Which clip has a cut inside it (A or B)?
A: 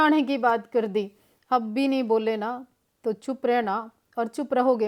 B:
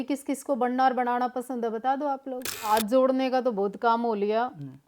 B